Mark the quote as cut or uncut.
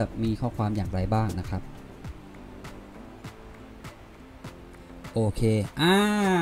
uncut